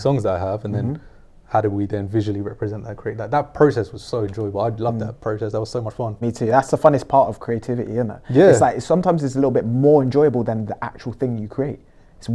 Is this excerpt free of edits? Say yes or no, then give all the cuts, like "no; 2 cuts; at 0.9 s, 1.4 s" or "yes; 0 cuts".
no; 1 cut; at 6.2 s